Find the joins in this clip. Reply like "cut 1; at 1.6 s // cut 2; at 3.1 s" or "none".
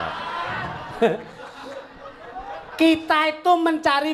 none